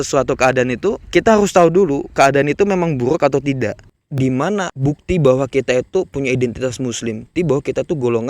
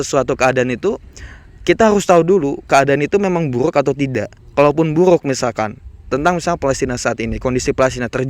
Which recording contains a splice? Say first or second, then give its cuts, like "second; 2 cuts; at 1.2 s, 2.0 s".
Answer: first; 4 cuts; at 1.0 s, 3.8 s, 4.7 s, 7.2 s